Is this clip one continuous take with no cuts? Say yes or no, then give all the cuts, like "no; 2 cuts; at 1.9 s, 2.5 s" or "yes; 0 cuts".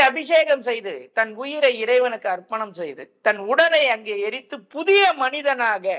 yes; 0 cuts